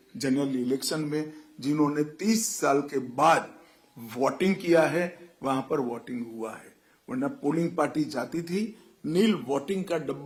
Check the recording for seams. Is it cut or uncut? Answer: uncut